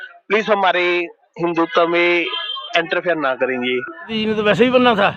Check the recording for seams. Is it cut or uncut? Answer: cut